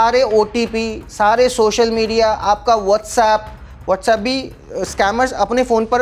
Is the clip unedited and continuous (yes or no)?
yes